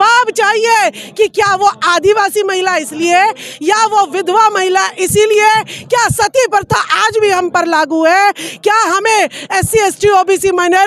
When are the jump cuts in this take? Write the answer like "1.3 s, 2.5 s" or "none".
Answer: none